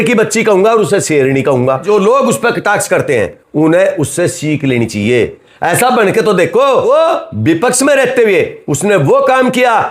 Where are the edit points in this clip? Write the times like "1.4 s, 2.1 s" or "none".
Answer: 1.8 s, 6.9 s